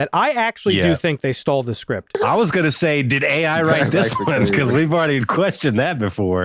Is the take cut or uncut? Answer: cut